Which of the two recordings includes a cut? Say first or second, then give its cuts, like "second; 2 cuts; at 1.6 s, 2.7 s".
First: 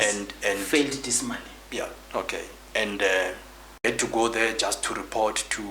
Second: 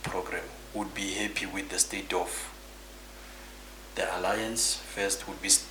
first; 1 cut; at 3.8 s